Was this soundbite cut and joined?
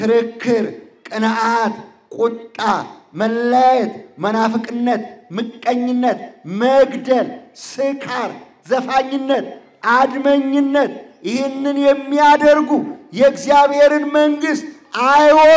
no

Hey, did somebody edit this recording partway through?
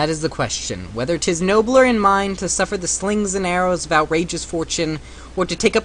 no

